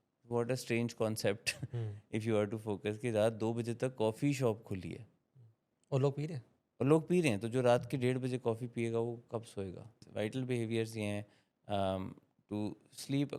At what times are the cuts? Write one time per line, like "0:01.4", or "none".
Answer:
0:09.9

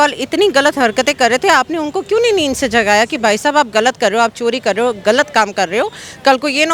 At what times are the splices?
none

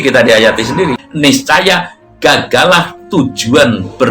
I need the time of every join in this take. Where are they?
0:01.0

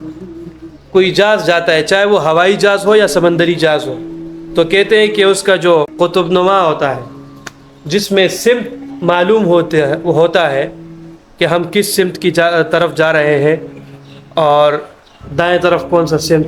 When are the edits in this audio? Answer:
0:05.9

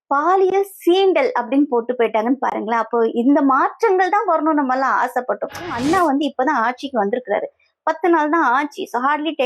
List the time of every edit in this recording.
0:05.8

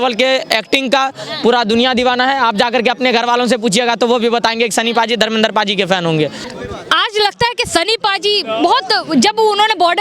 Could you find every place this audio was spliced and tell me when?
0:06.5

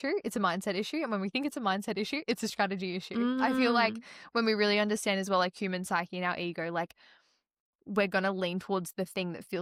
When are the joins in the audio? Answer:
none

